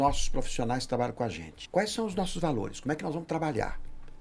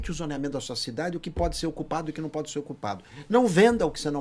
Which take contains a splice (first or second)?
first